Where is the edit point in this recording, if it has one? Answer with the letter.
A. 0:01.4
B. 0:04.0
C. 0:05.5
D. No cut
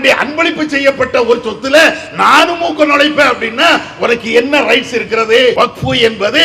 C